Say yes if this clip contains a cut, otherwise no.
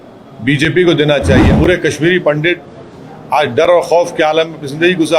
yes